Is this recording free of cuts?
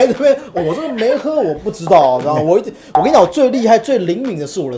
yes; 0 cuts

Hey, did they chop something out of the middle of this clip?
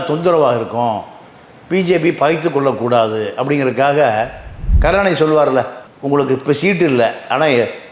yes; 1 cut; at 4.8 s

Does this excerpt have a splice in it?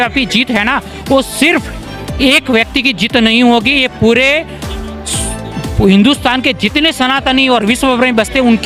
no; 0 cuts

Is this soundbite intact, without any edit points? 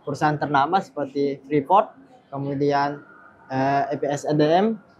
yes; 0 cuts

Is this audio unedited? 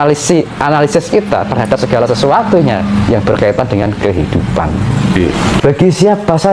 no; 1 cut; at 5.6 s

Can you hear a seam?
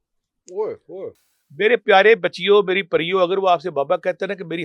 yes; 1 cut; at 1.1 s

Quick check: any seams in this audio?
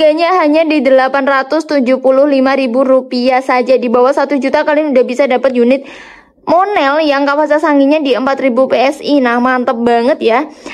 no; 0 cuts

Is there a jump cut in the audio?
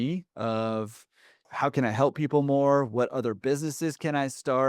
yes; 1 cut; at 1.4 s

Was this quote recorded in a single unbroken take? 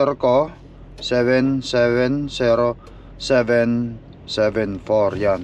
yes; 0 cuts

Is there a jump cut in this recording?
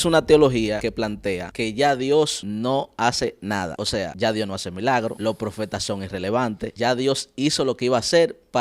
yes; 5 cuts; at 0.9 s, 2.4 s, 4.0 s, 5.2 s, 6.7 s

